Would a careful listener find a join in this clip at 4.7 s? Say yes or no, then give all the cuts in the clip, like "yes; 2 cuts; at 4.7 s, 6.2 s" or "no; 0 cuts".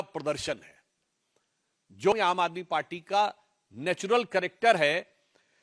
no; 1 cut; at 2.1 s